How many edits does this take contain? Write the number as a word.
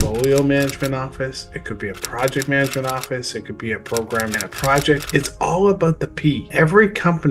two